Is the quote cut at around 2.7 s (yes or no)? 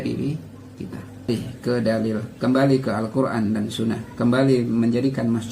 no